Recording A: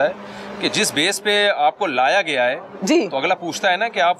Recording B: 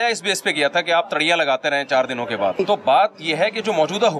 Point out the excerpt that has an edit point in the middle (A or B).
B